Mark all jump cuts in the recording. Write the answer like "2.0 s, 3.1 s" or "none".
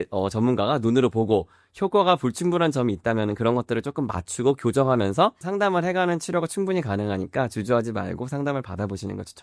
none